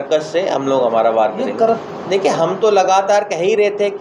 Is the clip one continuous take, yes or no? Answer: yes